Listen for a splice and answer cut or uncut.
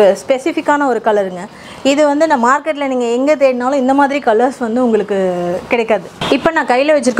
uncut